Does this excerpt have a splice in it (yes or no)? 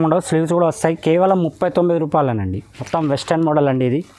yes